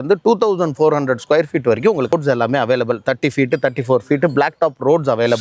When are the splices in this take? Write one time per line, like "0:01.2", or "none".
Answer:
0:02.1